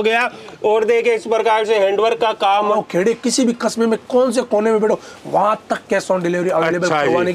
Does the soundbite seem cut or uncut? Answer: cut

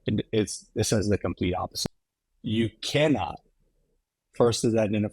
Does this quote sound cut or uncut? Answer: cut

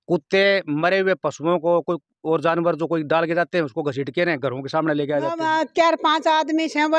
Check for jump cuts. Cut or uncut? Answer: cut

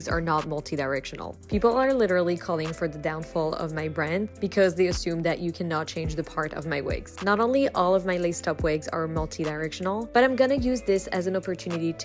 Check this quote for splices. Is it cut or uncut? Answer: uncut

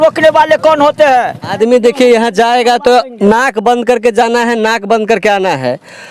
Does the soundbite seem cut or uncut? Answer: cut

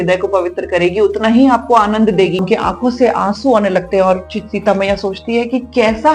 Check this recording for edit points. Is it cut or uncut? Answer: cut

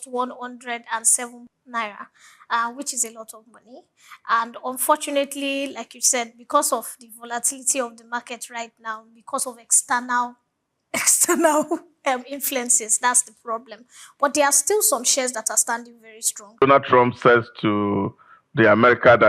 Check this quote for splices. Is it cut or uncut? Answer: cut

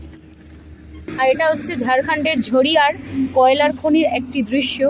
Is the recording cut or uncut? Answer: cut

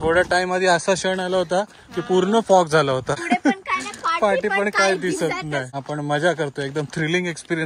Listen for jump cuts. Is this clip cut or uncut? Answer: cut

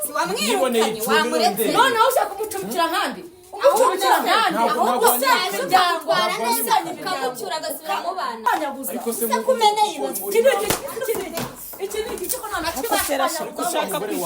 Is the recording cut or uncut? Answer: cut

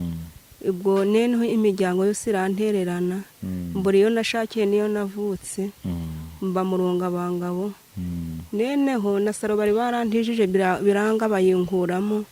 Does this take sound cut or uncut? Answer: uncut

